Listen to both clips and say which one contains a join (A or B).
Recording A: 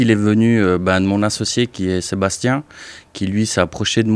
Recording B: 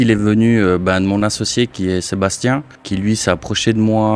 B